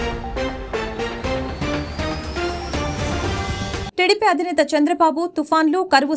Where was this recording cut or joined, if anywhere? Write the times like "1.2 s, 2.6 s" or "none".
3.9 s